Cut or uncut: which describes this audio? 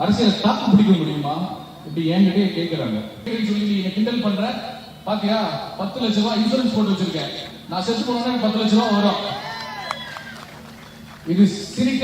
cut